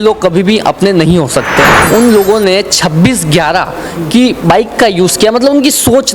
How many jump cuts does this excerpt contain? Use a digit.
1